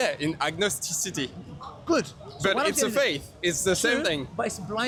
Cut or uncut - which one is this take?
uncut